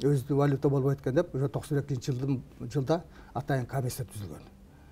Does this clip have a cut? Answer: no; 0 cuts

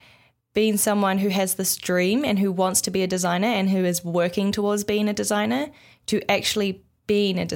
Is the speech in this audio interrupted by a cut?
no; 0 cuts

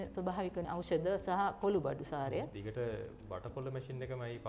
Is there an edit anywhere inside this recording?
yes; 1 cut; at 2.5 s

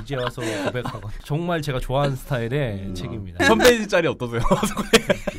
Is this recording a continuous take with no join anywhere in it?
no; 2 cuts; at 1.2 s, 3.4 s

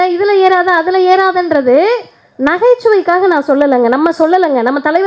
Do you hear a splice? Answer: no; 0 cuts

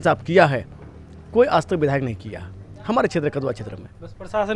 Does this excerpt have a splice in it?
no; 0 cuts

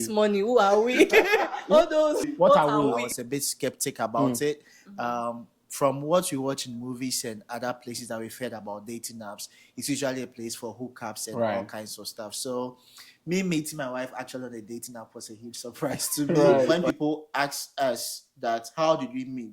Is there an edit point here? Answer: yes; 3 cuts; at 2.2 s, 3.0 s, 16.7 s

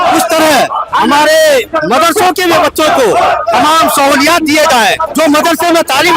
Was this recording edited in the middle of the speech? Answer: yes; 1 cut; at 5.0 s

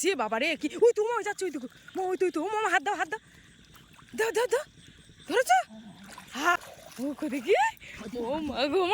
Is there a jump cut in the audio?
yes; 1 cut; at 6.6 s

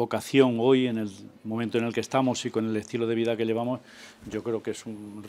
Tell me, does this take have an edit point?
no; 0 cuts

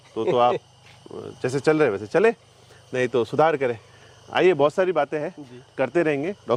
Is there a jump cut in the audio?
no; 0 cuts

